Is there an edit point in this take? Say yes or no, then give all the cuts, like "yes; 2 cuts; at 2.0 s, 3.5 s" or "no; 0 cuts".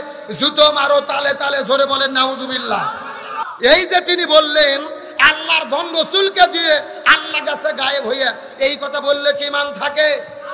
yes; 1 cut; at 3.4 s